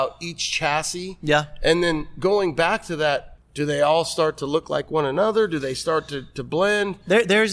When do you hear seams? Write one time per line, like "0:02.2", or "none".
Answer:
0:03.4